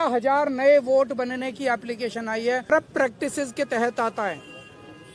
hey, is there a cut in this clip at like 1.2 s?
no; 1 cut; at 2.7 s

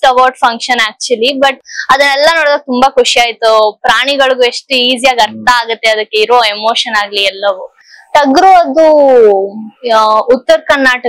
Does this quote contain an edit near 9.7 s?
no; 2 cuts; at 1.6 s, 7.9 s

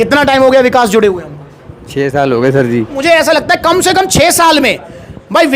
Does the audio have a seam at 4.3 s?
no; 1 cut; at 3.0 s

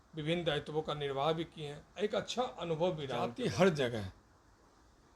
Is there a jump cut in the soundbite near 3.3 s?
yes; 1 cut; at 3.3 s

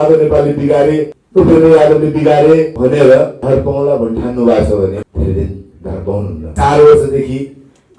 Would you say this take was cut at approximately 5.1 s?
yes; 5 cuts; at 1.2 s, 2.7 s, 3.4 s, 5.1 s, 6.4 s

